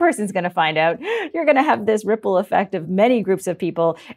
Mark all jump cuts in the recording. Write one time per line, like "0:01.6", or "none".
0:02.8